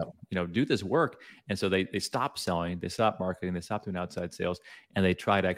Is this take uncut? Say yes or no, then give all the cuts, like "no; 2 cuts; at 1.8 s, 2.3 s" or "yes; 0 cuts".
yes; 0 cuts